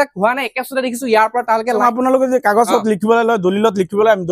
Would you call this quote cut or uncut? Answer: cut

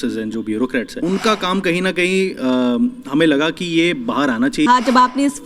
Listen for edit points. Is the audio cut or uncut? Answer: cut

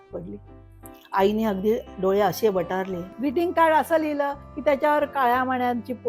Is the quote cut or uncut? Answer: cut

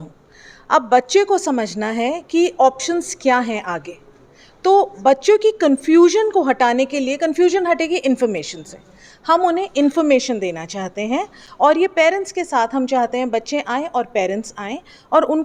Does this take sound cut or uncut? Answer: uncut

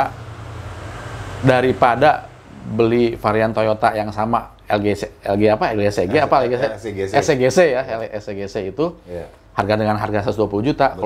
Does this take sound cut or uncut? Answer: uncut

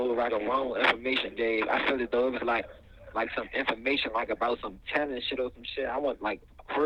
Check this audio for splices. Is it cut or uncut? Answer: uncut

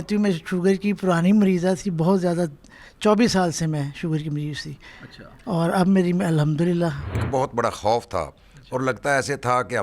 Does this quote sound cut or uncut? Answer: cut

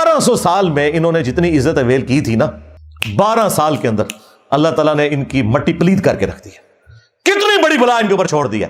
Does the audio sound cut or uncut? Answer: uncut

